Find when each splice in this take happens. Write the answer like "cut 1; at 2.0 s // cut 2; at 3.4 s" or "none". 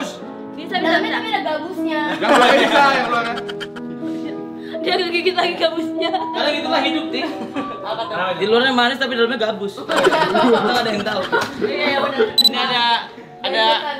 cut 1; at 12.5 s